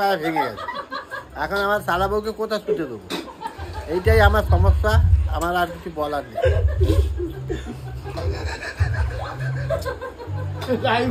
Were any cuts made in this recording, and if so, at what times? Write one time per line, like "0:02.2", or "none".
0:01.0